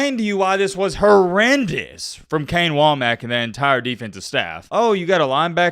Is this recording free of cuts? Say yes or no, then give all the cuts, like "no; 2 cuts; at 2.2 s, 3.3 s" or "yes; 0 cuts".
no; 1 cut; at 4.6 s